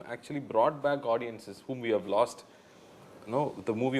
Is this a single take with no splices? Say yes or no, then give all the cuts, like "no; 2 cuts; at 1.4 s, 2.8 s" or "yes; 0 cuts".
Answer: yes; 0 cuts